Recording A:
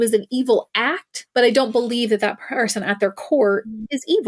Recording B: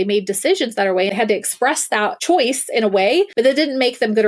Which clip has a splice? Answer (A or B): B